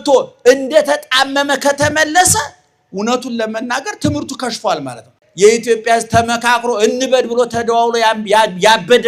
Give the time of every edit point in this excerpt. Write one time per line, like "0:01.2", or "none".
0:05.2